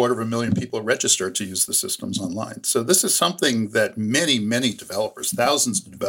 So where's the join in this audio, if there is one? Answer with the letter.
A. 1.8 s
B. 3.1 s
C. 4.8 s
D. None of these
D